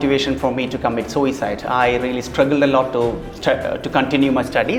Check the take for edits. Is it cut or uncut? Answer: uncut